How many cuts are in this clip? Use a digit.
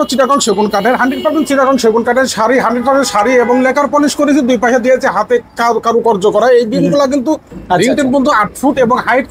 1